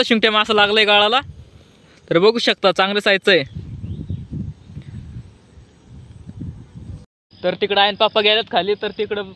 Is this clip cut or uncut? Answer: uncut